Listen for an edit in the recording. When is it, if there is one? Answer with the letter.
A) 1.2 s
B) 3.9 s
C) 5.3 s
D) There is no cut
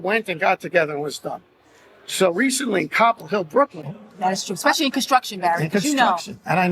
B